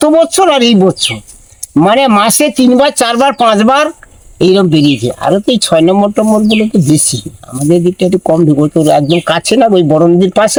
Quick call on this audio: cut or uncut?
uncut